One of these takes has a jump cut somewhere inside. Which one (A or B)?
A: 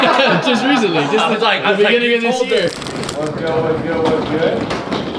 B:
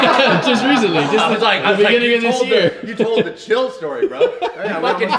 A